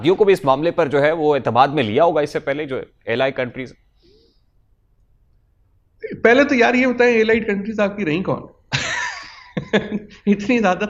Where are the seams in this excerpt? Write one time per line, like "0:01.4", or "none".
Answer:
none